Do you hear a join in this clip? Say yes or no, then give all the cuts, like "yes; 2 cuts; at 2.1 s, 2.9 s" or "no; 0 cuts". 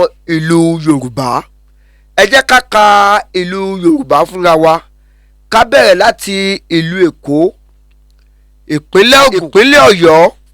yes; 1 cut; at 9.4 s